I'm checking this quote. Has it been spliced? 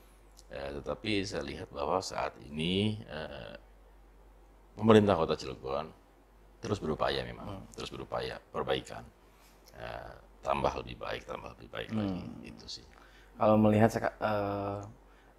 no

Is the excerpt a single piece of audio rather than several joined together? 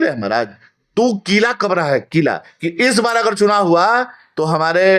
no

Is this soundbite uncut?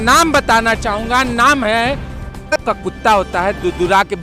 no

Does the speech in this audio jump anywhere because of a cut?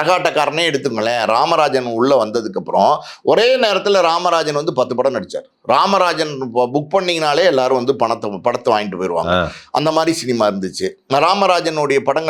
no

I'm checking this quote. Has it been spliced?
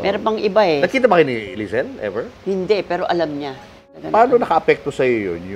yes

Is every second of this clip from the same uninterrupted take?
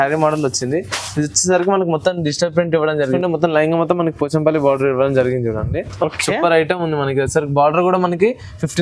no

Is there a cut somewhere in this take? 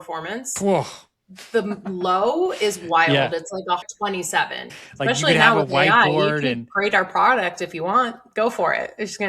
yes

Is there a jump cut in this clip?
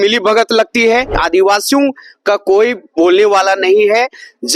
yes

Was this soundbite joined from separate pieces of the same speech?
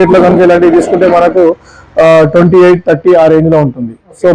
no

